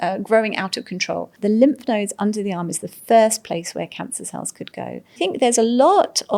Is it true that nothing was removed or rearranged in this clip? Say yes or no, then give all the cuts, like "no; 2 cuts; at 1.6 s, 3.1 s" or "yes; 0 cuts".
no; 2 cuts; at 1.3 s, 5.2 s